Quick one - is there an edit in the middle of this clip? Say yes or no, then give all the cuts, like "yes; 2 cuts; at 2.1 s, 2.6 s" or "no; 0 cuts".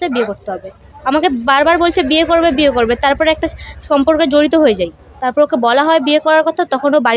yes; 2 cuts; at 0.9 s, 5.0 s